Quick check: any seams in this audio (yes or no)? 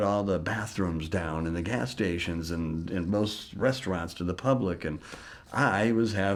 no